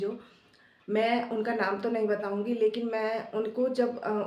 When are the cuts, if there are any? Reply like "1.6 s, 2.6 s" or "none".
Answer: none